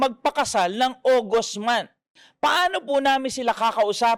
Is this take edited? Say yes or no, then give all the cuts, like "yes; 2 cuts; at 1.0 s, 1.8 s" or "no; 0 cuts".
no; 0 cuts